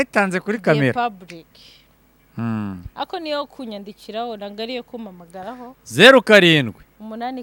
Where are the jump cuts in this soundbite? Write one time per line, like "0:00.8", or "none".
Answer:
none